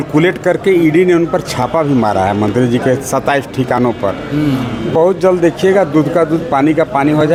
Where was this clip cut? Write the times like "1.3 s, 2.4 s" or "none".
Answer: none